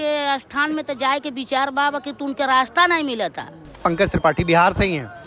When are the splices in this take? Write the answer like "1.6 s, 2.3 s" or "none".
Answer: 3.8 s